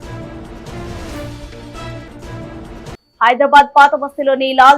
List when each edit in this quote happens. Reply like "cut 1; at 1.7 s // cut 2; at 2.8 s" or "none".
cut 1; at 2.9 s